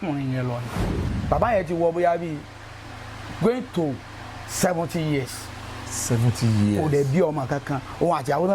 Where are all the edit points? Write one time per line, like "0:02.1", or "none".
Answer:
0:01.1